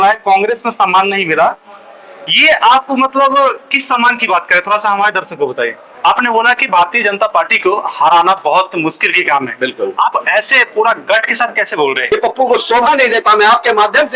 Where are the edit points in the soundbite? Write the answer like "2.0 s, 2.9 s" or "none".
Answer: 5.8 s, 12.0 s